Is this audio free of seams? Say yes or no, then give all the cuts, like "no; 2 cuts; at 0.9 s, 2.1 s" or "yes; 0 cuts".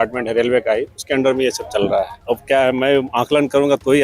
no; 1 cut; at 2.2 s